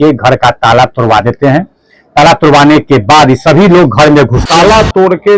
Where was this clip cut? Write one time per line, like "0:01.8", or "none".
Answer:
0:04.4